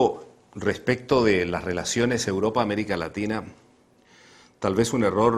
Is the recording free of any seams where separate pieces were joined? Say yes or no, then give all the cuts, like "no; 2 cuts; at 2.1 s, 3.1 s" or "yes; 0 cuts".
yes; 0 cuts